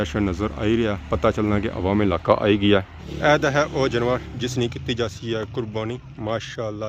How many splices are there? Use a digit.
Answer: 1